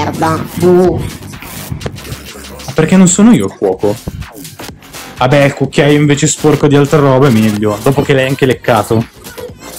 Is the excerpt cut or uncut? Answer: uncut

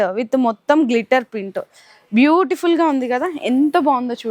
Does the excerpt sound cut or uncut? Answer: uncut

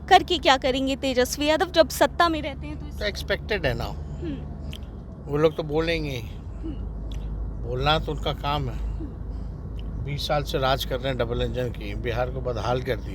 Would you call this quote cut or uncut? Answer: uncut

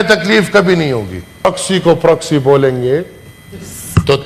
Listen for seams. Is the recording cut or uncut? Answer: cut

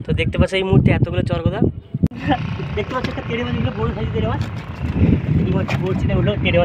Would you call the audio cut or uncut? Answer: cut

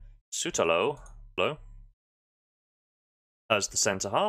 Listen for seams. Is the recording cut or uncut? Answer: cut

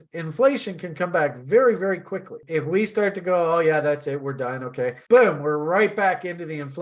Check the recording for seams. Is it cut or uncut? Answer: uncut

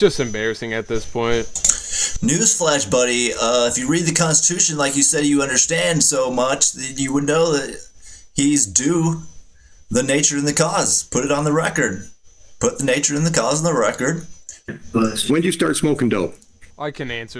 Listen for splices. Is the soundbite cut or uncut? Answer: cut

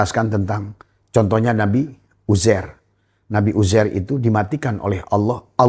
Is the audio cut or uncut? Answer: uncut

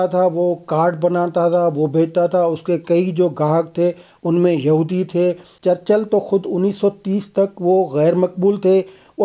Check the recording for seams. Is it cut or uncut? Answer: cut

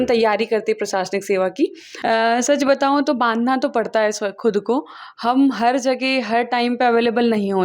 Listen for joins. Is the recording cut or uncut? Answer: cut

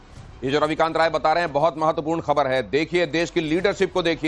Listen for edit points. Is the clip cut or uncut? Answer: cut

